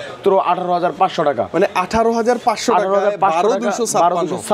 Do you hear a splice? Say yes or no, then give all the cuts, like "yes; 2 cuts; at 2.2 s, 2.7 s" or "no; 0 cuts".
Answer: no; 0 cuts